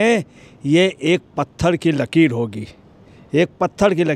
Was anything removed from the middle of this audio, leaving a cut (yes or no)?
no